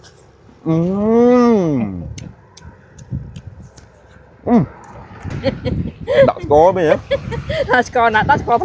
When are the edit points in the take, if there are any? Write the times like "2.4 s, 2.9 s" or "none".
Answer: 5.3 s